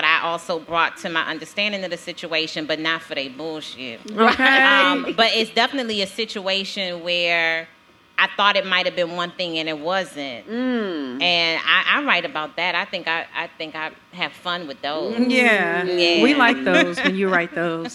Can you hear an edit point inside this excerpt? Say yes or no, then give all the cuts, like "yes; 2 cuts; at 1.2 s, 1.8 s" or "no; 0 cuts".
no; 0 cuts